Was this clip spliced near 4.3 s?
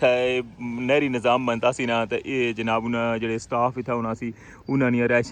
no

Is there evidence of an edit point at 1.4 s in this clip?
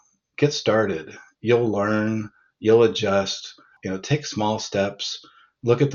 no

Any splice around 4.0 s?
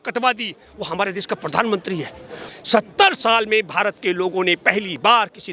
no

